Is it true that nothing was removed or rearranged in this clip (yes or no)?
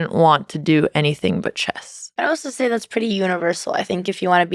no